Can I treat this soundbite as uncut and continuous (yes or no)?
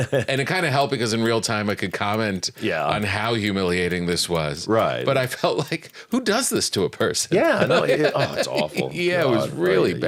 yes